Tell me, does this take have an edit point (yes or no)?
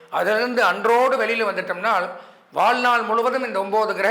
no